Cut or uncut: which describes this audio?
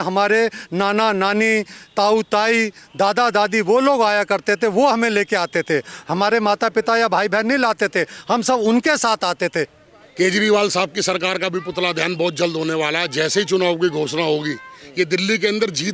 cut